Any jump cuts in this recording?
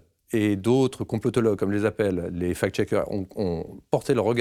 no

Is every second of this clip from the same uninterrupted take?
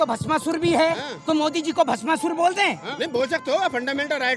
no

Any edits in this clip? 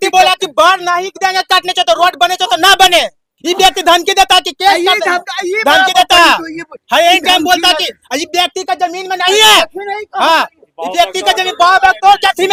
no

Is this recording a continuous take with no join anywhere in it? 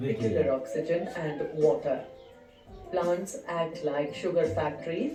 yes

